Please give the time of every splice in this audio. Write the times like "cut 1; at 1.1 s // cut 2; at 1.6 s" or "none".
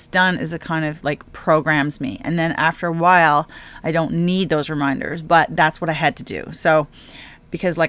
none